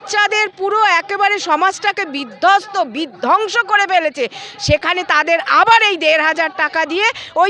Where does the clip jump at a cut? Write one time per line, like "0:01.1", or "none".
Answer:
none